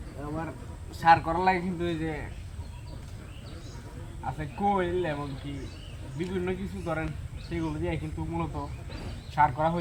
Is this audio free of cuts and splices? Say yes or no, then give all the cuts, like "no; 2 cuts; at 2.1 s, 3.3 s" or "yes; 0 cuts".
yes; 0 cuts